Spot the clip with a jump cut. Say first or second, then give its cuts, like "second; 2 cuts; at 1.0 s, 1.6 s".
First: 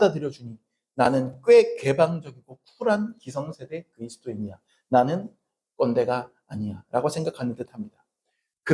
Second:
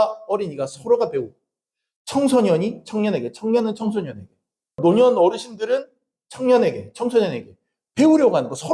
second; 1 cut; at 4.8 s